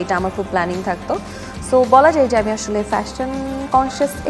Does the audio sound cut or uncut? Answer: cut